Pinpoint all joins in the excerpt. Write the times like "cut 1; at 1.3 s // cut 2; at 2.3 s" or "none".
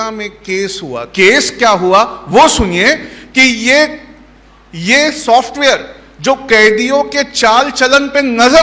cut 1; at 1.0 s